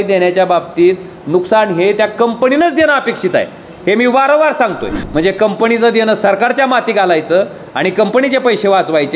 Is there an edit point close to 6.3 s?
no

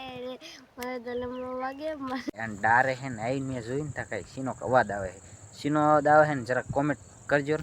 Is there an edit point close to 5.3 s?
no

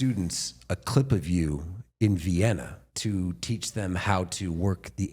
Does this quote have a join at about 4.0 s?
no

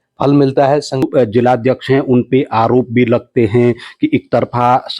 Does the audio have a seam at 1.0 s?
yes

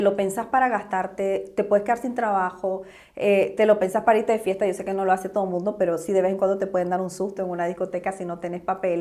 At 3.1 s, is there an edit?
no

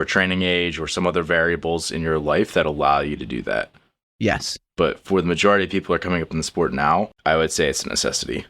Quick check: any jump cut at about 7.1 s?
yes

